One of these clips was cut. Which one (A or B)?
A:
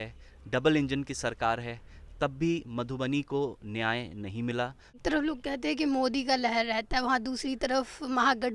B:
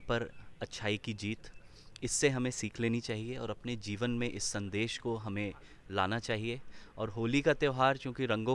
A